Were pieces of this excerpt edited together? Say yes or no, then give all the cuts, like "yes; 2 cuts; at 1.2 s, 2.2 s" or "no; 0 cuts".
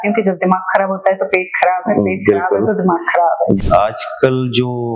yes; 1 cut; at 3.6 s